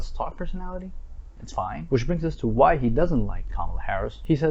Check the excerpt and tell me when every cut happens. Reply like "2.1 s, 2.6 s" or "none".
none

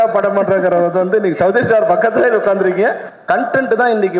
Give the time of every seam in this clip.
3.1 s

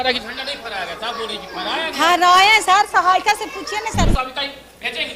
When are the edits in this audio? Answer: none

